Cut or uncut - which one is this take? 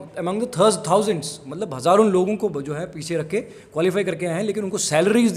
uncut